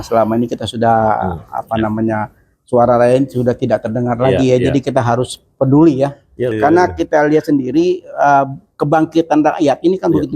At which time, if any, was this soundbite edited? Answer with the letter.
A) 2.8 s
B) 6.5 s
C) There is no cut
B